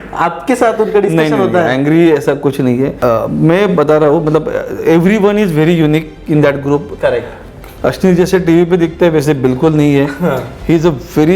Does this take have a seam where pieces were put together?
yes; 1 cut; at 3.0 s

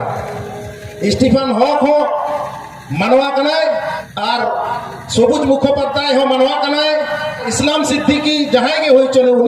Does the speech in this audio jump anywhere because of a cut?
yes; 2 cuts; at 4.1 s, 7.5 s

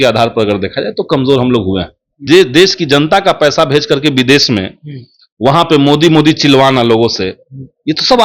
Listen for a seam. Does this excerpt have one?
yes; 1 cut; at 2.2 s

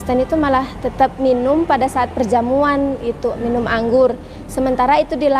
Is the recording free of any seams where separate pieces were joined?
yes; 0 cuts

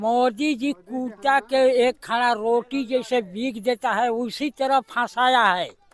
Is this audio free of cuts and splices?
yes; 0 cuts

